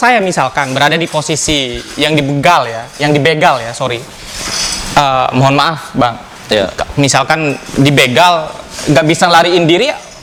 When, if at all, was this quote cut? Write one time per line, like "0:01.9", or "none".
none